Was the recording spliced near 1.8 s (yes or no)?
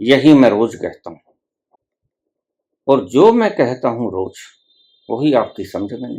yes